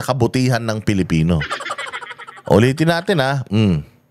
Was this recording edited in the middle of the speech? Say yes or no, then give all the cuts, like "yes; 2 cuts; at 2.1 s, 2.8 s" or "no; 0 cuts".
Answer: no; 0 cuts